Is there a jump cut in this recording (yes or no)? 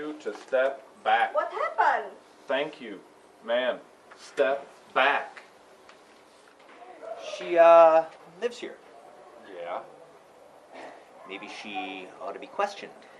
yes